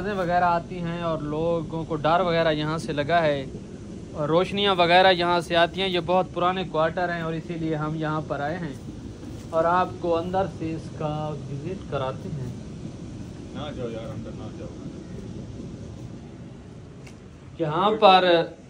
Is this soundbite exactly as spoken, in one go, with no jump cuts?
yes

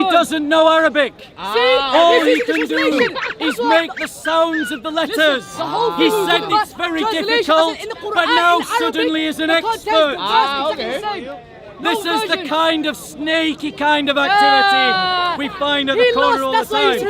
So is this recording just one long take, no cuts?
yes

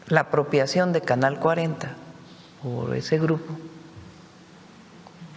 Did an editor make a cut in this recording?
no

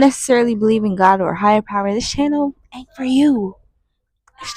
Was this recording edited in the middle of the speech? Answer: no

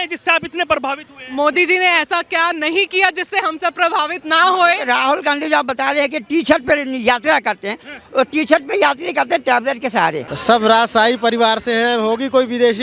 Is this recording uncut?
no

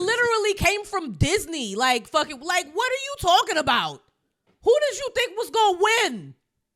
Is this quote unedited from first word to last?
yes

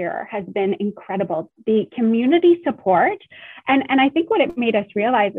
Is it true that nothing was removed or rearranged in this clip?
no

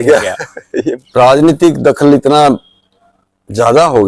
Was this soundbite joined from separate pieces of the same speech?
yes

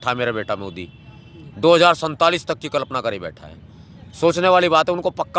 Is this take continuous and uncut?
yes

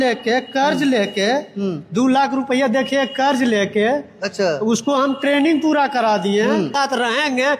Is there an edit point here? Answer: yes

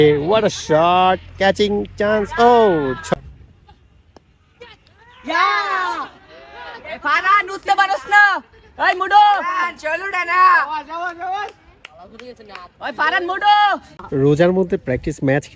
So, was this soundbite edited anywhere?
yes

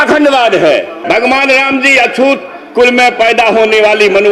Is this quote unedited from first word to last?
no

